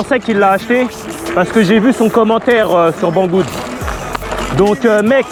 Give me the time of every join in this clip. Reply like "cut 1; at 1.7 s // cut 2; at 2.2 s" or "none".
none